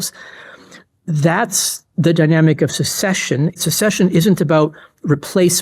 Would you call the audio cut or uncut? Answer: cut